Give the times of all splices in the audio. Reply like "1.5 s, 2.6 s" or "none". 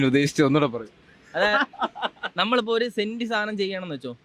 none